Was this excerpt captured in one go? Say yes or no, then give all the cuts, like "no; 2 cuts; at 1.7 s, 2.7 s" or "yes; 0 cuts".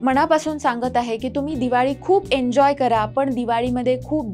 yes; 0 cuts